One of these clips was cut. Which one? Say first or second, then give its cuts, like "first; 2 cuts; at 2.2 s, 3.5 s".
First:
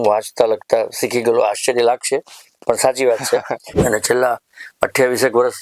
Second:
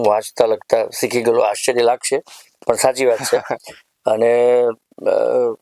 first; 1 cut; at 3.6 s